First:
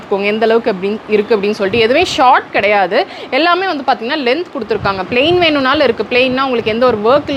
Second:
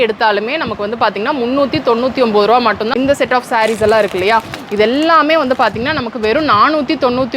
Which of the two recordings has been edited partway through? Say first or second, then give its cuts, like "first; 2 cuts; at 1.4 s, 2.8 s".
second; 1 cut; at 2.9 s